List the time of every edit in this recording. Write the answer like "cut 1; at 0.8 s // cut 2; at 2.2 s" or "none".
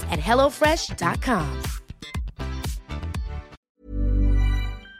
cut 1; at 3.5 s